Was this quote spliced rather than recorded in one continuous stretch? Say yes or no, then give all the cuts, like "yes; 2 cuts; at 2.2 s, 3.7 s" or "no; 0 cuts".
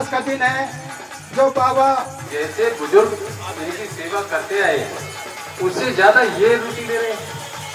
yes; 1 cut; at 2.2 s